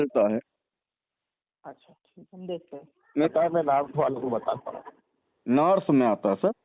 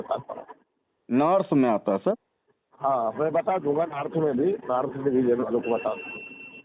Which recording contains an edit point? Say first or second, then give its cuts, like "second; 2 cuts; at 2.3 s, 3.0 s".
first; 1 cut; at 3.3 s